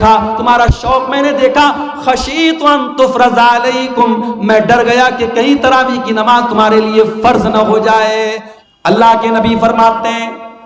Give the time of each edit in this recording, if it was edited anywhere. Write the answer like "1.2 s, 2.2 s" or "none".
8.5 s

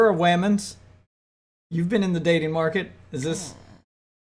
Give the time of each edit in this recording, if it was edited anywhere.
none

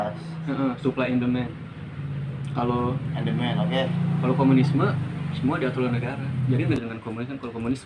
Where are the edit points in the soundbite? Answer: 6.8 s

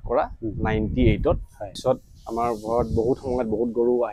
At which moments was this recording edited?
1.8 s

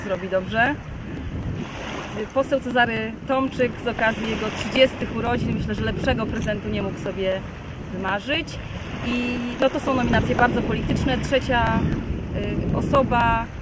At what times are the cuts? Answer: none

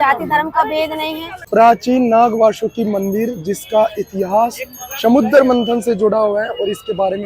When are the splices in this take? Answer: 1.4 s

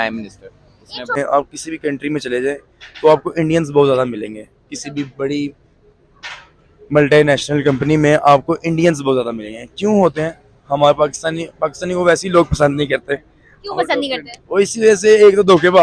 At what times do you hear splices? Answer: 1.2 s

